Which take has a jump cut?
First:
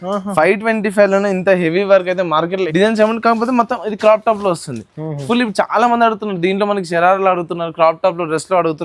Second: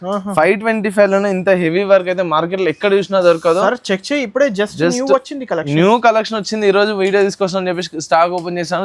first; 1 cut; at 2.6 s

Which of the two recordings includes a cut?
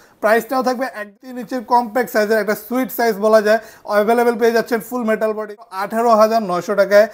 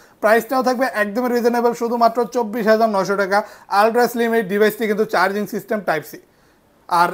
first; 2 cuts; at 1.2 s, 5.6 s

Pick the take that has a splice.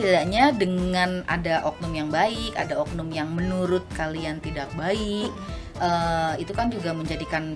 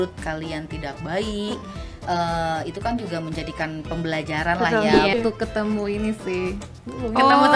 second; 1 cut; at 5.1 s

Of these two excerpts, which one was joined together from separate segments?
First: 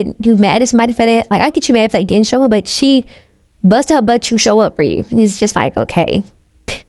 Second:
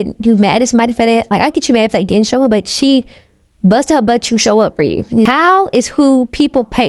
second; 1 cut; at 5.3 s

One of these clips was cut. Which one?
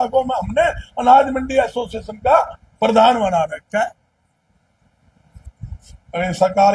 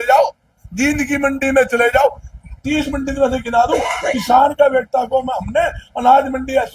first; 1 cut; at 5.3 s

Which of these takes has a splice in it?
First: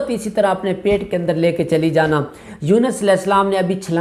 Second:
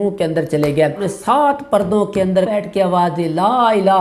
second; 2 cuts; at 1.1 s, 2.5 s

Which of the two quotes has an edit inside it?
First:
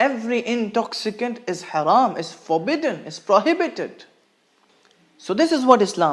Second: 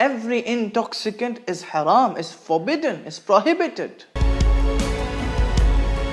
second; 1 cut; at 4.2 s

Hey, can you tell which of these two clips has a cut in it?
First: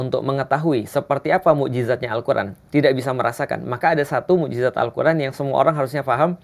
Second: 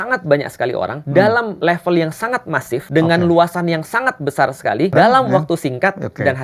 second; 4 cuts; at 1.0 s, 1.5 s, 2.9 s, 4.9 s

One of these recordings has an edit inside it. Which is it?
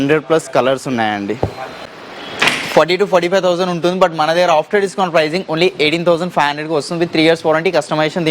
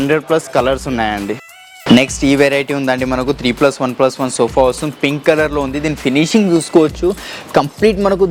first; 1 cut; at 1.7 s

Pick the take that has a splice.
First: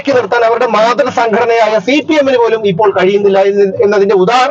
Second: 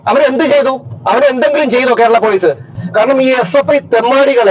second; 1 cut; at 2.8 s

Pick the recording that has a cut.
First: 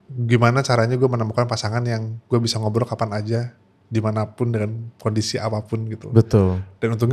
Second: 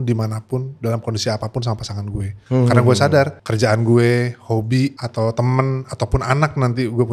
second; 3 cuts; at 2.3 s, 3.4 s, 5.0 s

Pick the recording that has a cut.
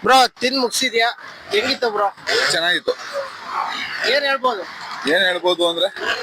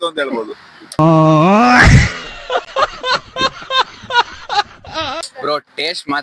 second; 2 cuts; at 1.0 s, 5.2 s

